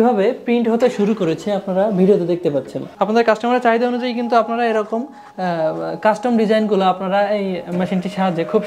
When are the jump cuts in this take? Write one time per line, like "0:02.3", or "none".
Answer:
0:02.8